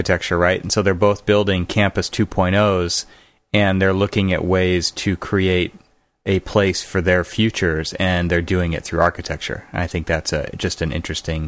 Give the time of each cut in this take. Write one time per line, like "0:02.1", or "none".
none